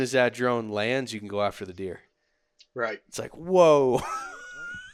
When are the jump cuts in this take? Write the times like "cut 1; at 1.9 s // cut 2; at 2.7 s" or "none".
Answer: none